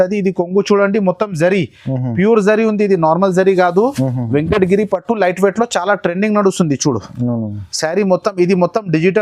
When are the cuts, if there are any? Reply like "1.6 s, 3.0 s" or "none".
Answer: none

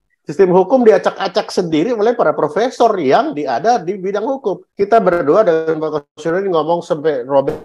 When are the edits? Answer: none

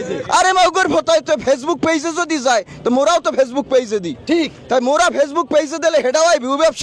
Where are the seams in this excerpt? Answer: none

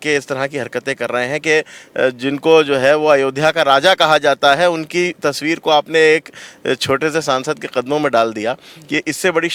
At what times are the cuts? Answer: none

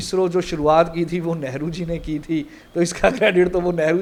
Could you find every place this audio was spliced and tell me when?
none

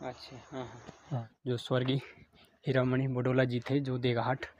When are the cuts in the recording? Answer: 1.3 s

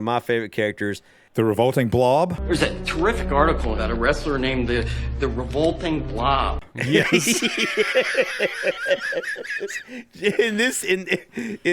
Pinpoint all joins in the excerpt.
none

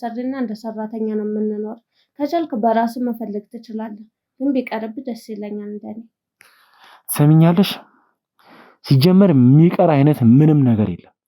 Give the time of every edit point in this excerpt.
none

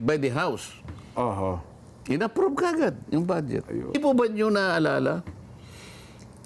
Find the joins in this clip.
4.0 s

